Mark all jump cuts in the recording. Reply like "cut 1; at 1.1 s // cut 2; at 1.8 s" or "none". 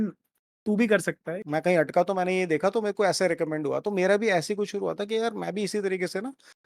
cut 1; at 1.3 s